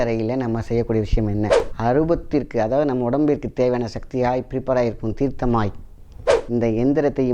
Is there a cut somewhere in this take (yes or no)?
yes